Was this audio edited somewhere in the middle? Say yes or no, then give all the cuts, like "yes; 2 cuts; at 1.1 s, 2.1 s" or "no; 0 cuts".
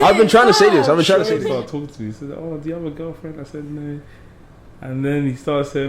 yes; 1 cut; at 1.4 s